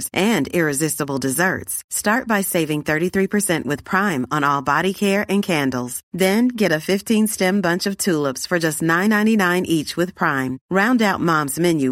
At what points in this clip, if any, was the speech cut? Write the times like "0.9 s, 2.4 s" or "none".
none